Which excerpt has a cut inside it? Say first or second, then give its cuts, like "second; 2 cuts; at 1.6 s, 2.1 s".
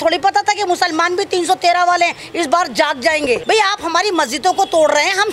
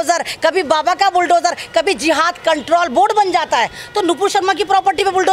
first; 1 cut; at 3.4 s